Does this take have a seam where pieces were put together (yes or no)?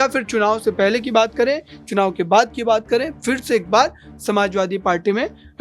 no